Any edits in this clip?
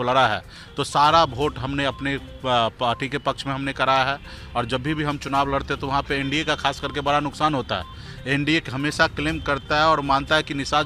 no; 0 cuts

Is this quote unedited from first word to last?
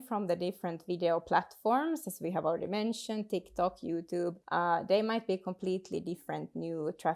no; 1 cut; at 4.4 s

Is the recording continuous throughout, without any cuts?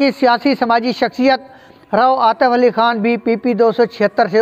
yes; 0 cuts

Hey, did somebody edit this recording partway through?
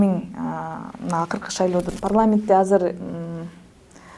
yes; 1 cut; at 1.9 s

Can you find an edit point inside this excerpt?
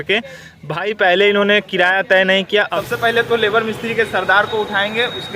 yes; 1 cut; at 2.7 s

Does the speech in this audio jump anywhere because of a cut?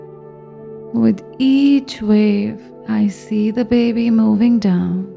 yes; 1 cut; at 0.9 s

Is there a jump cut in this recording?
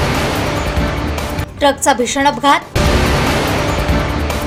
no; 0 cuts

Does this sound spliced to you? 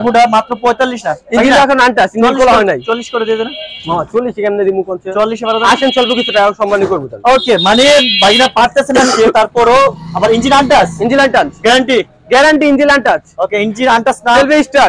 no; 0 cuts

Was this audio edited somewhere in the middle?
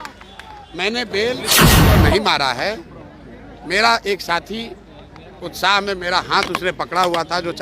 yes; 2 cuts; at 1.4 s, 2.1 s

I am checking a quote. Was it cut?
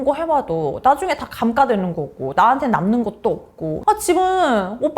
yes; 1 cut; at 3.8 s

